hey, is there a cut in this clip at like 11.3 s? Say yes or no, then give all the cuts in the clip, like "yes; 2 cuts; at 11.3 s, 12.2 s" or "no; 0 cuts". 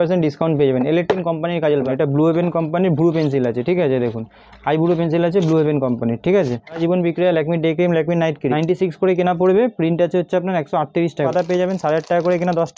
yes; 4 cuts; at 1.9 s, 6.8 s, 8.5 s, 11.3 s